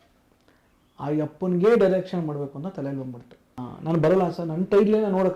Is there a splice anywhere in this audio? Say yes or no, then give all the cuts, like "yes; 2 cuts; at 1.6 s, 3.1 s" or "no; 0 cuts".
yes; 1 cut; at 3.6 s